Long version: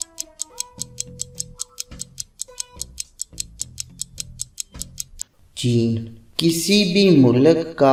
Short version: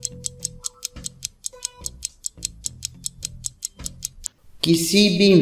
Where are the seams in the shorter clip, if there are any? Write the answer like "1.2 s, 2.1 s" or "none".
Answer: 4.4 s

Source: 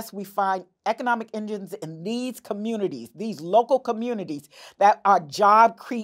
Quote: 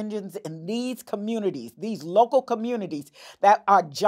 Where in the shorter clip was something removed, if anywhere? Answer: none

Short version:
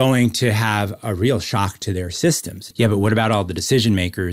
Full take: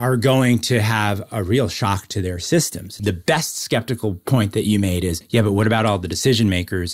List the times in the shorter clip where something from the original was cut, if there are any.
2.7 s

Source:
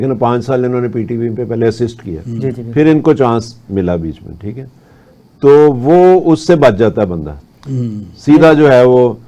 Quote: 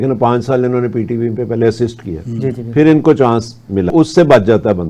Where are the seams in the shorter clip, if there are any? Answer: 3.9 s

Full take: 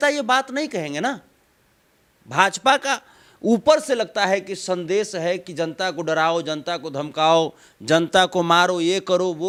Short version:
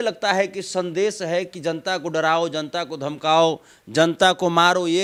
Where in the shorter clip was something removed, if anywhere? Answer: none

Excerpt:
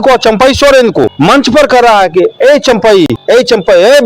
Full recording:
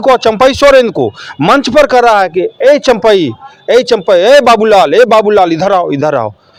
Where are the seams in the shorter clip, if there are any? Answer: 1.1 s, 3.2 s

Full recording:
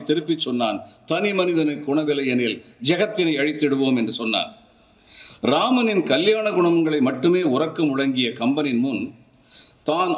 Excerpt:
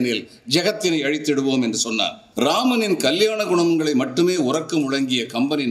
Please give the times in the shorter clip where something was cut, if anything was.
2.2 s

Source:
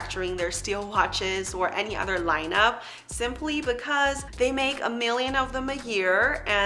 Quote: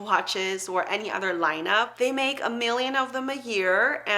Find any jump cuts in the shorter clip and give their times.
1.9 s

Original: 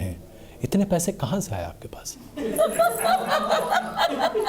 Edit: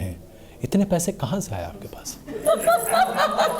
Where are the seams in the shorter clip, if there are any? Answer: 2.4 s

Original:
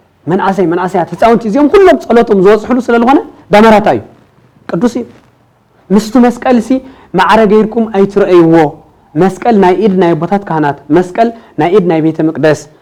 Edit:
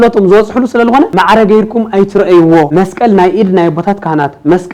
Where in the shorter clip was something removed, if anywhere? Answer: 1.1 s, 2.7 s

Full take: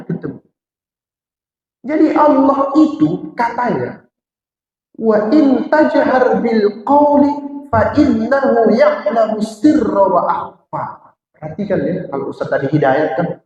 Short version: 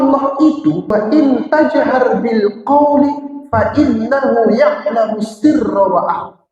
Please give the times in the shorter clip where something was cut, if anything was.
0.9 s

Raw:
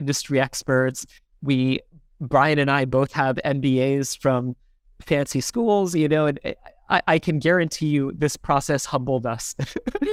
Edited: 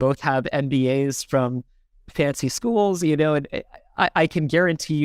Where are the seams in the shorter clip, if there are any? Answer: none

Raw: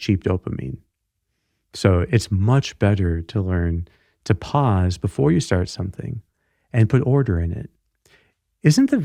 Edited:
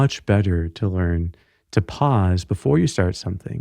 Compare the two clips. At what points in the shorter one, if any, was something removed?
none

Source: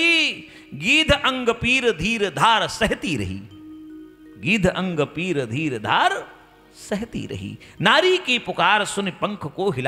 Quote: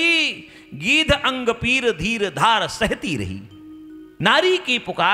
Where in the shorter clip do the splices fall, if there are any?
4.0 s

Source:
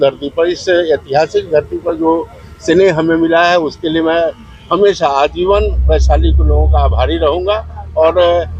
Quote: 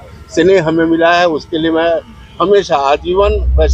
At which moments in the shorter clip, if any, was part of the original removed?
none

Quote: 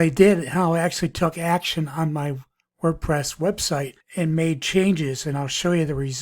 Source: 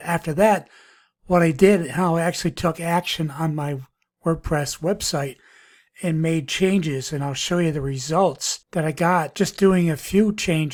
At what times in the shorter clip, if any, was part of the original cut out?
4.0 s

